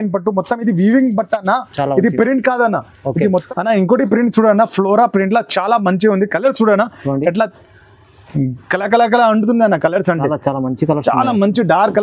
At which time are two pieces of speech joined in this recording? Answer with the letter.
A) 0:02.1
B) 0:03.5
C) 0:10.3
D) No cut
B